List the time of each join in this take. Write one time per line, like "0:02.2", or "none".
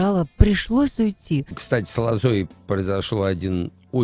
0:01.6